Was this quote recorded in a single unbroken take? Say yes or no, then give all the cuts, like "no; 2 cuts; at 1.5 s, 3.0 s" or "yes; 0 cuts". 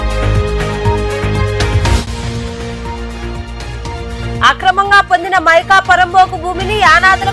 no; 1 cut; at 1.7 s